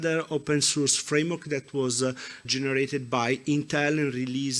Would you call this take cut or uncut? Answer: cut